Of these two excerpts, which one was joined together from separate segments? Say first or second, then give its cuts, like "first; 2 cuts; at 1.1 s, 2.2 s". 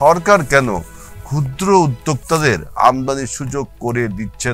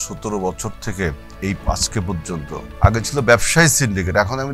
second; 2 cuts; at 1.3 s, 2.7 s